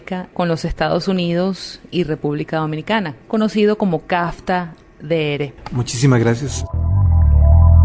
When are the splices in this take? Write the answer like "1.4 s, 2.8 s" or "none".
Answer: 5.6 s, 6.6 s